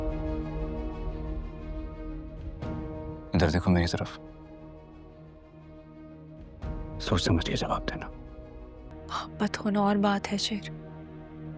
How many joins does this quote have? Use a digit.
1